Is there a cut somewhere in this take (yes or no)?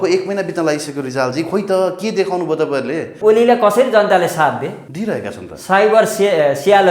yes